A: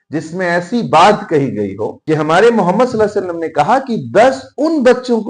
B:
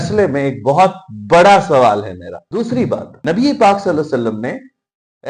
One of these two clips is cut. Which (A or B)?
B